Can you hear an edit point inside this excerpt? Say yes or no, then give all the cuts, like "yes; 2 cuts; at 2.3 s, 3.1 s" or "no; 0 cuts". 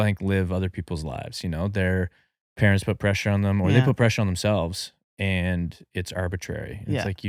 no; 0 cuts